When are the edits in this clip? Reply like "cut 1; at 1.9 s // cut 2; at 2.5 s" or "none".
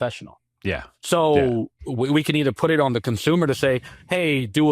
cut 1; at 1.8 s